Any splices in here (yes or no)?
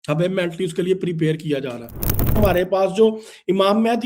yes